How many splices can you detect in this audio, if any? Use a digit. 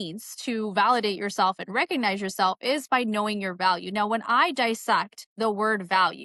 0